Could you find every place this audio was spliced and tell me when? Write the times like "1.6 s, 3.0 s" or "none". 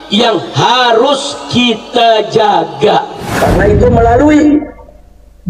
3.2 s